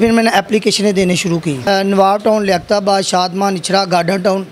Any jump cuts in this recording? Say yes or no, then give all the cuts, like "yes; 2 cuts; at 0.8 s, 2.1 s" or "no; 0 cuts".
yes; 1 cut; at 1.6 s